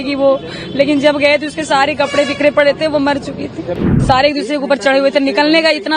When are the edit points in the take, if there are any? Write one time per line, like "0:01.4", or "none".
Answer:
0:03.9